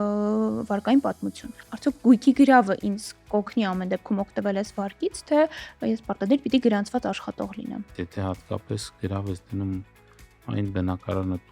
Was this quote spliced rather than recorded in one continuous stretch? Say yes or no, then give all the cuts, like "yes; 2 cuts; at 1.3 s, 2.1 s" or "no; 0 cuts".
yes; 1 cut; at 7.9 s